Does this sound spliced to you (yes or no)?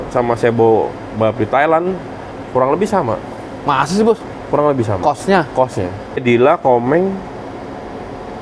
yes